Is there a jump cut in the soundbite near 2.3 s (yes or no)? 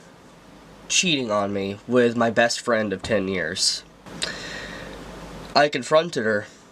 no